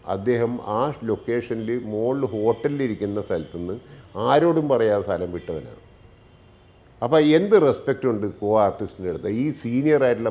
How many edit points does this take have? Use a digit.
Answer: 0